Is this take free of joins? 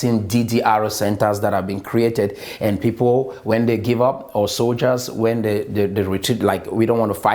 yes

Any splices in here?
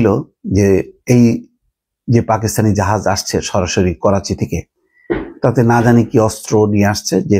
no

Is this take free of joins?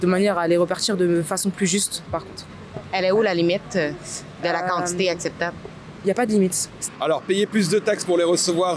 yes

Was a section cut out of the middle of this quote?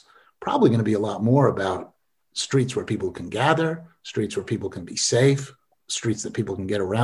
no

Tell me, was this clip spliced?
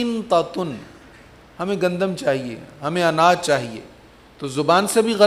no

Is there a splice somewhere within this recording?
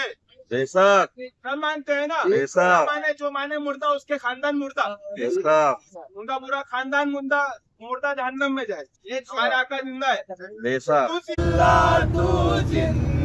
yes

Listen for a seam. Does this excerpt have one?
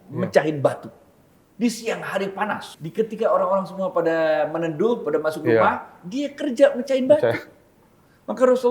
yes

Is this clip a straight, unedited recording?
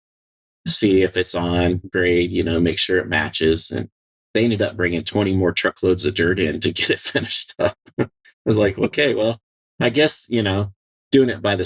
yes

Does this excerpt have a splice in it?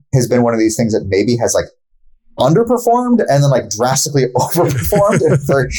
no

